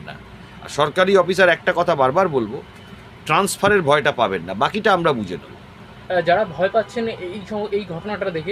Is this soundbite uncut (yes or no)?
yes